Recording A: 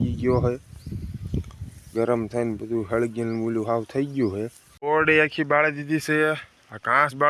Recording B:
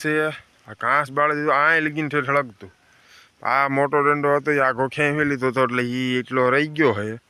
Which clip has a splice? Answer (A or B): A